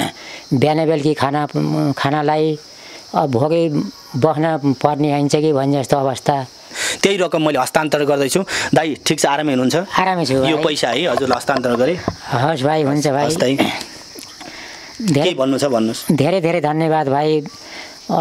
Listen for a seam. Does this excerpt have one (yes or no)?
yes